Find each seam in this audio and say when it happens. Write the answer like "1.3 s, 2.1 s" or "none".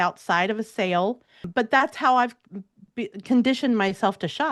1.4 s